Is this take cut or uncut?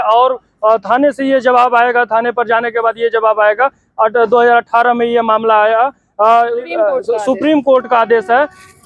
uncut